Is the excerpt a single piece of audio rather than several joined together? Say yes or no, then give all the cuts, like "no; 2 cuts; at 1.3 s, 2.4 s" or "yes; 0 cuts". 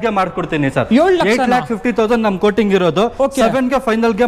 yes; 0 cuts